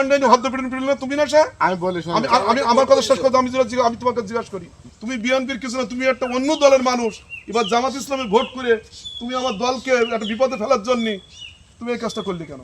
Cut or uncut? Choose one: cut